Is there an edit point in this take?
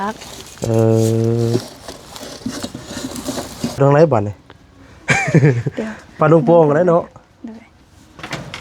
yes; 1 cut; at 3.8 s

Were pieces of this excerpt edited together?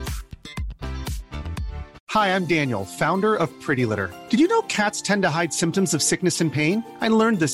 yes; 1 cut; at 2.0 s

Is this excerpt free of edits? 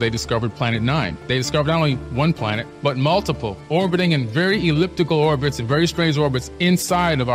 yes; 0 cuts

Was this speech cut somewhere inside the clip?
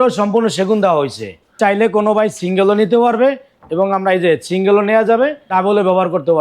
yes; 2 cuts; at 1.5 s, 5.5 s

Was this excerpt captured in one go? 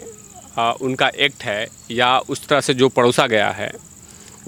yes; 0 cuts

